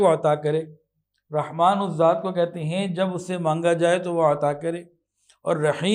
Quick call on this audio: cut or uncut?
uncut